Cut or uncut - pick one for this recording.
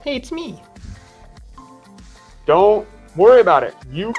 uncut